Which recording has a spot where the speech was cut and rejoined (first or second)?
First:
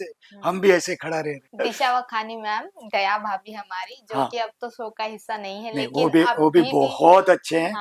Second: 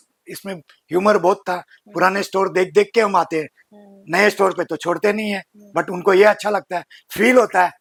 first